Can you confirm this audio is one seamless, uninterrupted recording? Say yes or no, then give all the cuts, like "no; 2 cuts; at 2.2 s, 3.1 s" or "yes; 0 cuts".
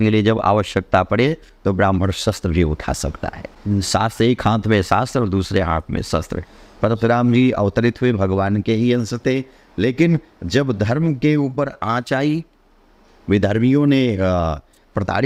yes; 0 cuts